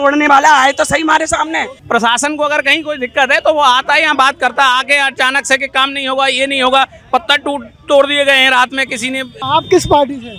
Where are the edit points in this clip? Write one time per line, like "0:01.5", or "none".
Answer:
0:01.7
0:09.3